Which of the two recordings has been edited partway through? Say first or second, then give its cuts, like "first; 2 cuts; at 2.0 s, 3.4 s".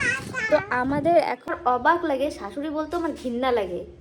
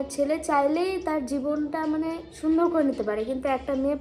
first; 1 cut; at 1.5 s